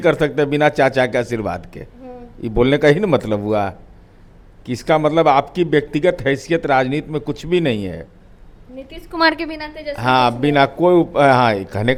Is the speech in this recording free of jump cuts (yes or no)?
yes